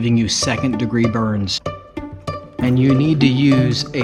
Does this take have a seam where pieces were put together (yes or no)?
no